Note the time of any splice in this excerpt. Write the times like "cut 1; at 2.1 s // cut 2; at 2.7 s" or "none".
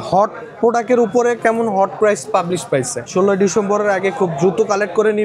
cut 1; at 3.1 s